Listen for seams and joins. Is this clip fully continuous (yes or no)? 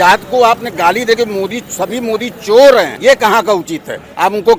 no